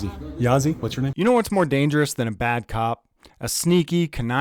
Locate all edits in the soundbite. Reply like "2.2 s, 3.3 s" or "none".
1.1 s